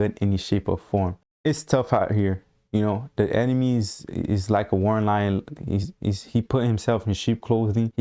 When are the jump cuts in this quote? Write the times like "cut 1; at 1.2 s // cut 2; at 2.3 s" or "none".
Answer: none

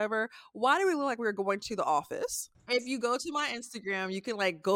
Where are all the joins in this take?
cut 1; at 2.5 s

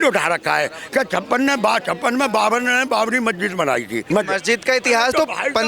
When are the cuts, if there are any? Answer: cut 1; at 4.0 s

